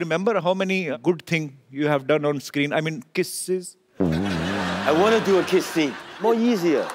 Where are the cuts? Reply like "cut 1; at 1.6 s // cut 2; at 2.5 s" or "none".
cut 1; at 0.9 s // cut 2; at 4.8 s // cut 3; at 6.2 s

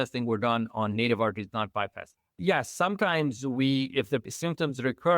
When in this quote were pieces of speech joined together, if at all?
cut 1; at 2.1 s // cut 2; at 4.2 s

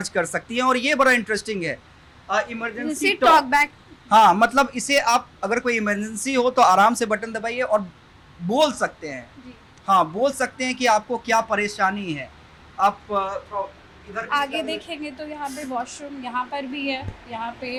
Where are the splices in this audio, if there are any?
none

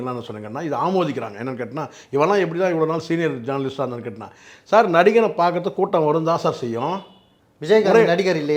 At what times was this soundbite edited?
none

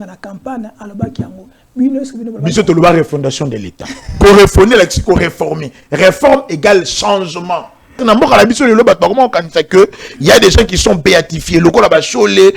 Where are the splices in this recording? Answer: cut 1; at 8.0 s

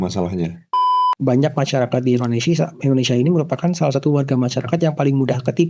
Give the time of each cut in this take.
cut 1; at 1.0 s

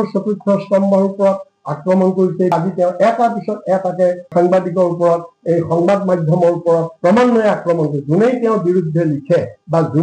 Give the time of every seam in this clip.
cut 1; at 2.5 s

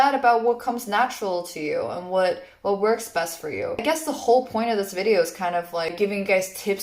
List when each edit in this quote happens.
cut 1; at 3.8 s // cut 2; at 6.0 s

